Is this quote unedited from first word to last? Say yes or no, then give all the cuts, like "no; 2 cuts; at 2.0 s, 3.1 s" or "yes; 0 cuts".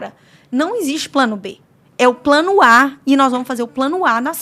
yes; 0 cuts